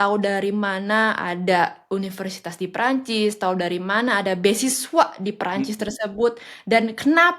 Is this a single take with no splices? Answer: yes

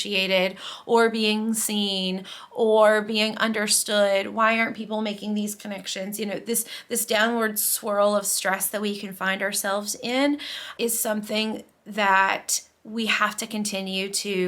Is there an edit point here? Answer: yes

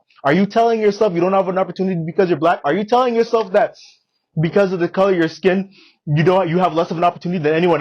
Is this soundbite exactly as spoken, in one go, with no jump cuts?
yes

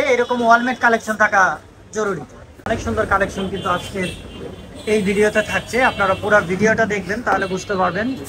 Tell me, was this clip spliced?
yes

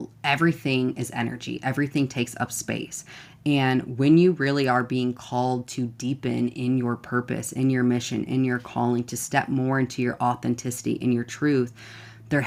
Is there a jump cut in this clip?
no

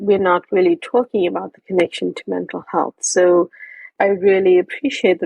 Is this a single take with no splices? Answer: no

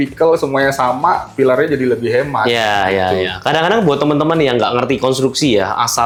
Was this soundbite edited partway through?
no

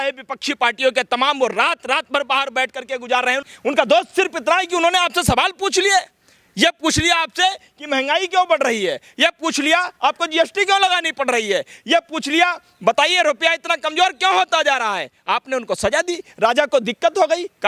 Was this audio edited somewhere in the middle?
yes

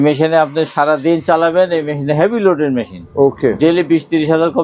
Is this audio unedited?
yes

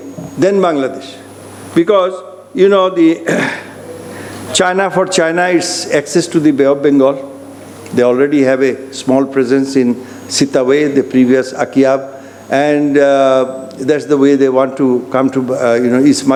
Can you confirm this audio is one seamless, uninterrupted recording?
yes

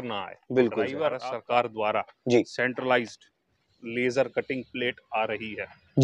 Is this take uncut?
no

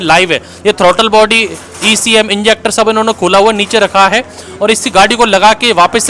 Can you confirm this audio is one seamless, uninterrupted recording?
yes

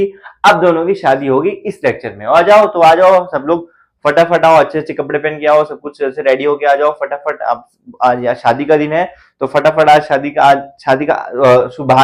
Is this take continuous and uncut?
yes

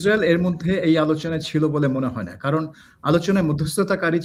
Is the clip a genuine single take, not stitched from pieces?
yes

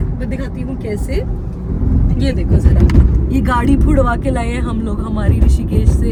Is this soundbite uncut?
yes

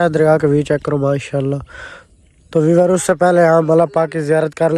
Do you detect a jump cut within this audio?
no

